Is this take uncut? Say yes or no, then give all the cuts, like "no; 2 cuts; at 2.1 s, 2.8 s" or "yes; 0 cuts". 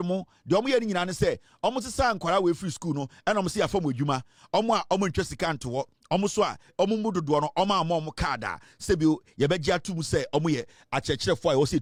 yes; 0 cuts